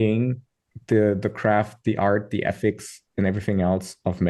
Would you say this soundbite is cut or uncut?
uncut